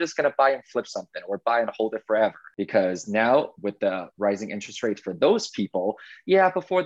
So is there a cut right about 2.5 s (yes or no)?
yes